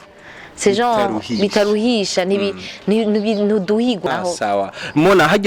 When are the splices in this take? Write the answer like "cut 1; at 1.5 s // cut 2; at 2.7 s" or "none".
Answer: cut 1; at 4.0 s